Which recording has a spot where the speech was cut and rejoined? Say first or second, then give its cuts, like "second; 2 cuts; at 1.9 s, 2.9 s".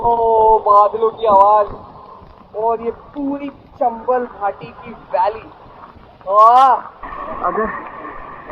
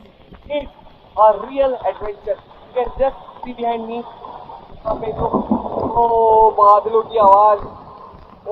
first; 1 cut; at 7.1 s